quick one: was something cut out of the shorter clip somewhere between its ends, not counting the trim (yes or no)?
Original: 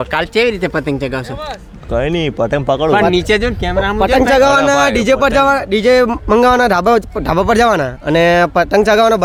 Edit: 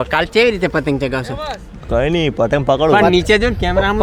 no